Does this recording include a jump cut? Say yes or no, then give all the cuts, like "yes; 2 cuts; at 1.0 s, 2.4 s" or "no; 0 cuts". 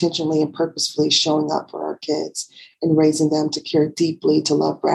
no; 0 cuts